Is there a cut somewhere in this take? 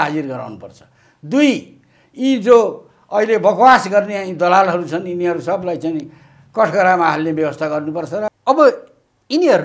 yes; 1 cut; at 8.4 s

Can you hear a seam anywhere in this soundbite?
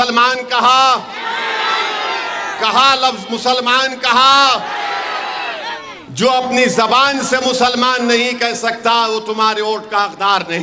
no; 0 cuts

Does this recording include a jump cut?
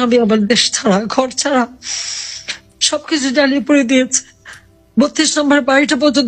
no; 0 cuts

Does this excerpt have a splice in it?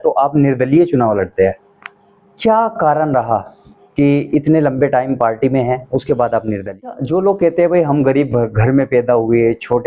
yes; 1 cut; at 6.7 s

